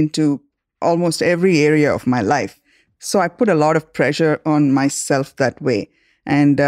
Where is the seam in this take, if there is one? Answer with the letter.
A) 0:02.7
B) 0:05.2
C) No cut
A